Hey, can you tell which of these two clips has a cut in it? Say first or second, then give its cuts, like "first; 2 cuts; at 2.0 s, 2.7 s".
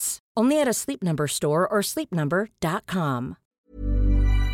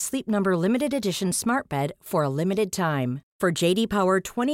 first; 1 cut; at 3.5 s